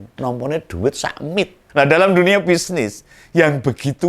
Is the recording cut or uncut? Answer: cut